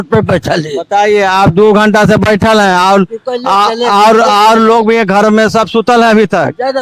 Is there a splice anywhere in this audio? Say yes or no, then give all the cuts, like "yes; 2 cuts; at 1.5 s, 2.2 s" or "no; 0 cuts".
no; 0 cuts